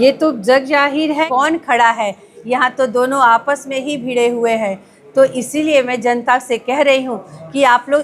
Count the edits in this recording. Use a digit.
1